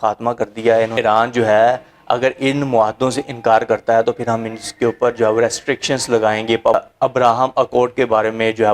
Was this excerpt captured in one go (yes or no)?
no